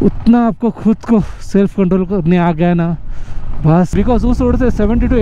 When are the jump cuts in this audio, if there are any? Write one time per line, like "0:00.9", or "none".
0:03.9

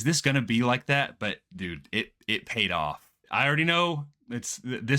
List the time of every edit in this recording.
0:03.2

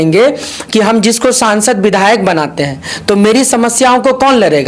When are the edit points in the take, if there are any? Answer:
none

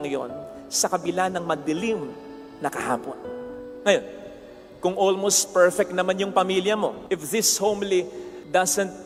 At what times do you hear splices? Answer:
none

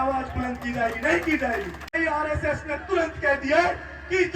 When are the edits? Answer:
0:01.9

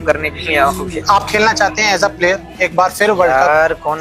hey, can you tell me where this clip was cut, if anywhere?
0:00.9

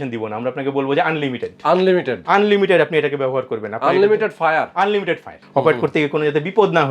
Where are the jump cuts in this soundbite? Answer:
0:05.3

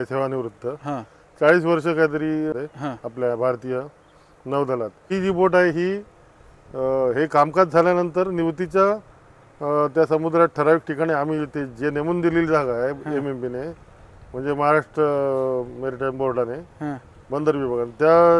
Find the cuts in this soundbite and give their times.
0:02.5
0:05.1

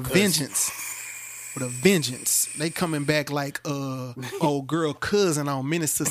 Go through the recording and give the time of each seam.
0:04.3

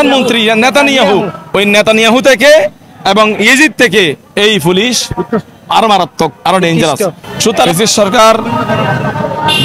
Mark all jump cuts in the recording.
0:07.7

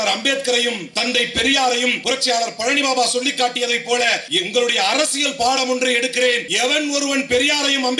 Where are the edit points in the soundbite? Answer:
0:00.9
0:02.0
0:04.3
0:06.5

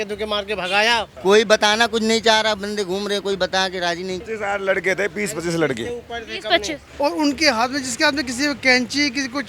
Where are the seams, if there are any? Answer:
0:01.1
0:04.2
0:06.8

